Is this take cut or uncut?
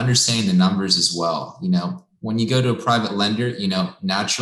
uncut